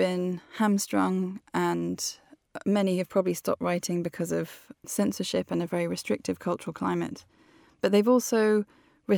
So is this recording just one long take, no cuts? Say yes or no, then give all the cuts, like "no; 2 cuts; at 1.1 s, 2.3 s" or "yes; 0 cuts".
no; 1 cut; at 4.8 s